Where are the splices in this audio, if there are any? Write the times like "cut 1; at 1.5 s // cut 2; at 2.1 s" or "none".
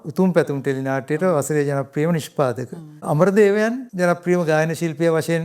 cut 1; at 3.0 s // cut 2; at 3.8 s